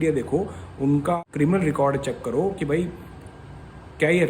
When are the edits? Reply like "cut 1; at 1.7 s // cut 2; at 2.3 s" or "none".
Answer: cut 1; at 1.2 s